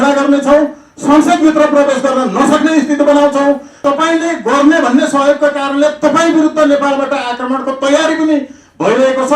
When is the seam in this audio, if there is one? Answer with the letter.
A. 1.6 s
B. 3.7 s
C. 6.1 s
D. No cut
B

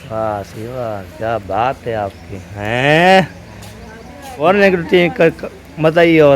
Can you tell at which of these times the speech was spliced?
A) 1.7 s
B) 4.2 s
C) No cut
B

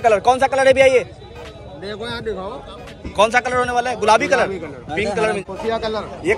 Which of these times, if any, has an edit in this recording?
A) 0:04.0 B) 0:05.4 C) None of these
B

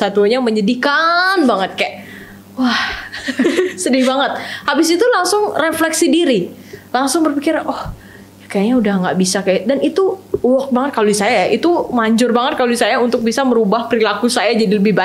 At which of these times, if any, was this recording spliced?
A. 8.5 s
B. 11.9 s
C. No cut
C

